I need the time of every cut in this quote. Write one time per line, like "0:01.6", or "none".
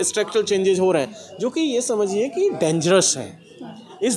none